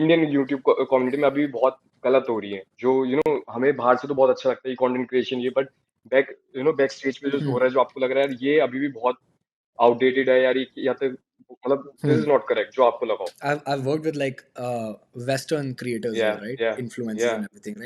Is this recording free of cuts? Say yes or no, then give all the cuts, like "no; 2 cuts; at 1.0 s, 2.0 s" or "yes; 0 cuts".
no; 1 cut; at 13.3 s